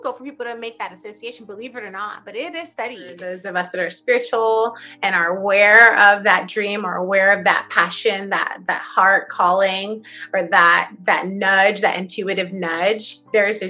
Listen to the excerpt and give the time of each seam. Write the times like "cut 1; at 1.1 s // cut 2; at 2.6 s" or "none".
cut 1; at 3.4 s